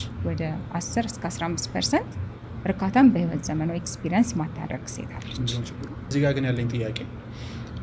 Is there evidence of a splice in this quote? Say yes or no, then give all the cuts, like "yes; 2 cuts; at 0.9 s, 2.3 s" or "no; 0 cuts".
yes; 1 cut; at 6.1 s